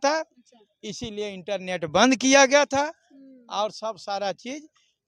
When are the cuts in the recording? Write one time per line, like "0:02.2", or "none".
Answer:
none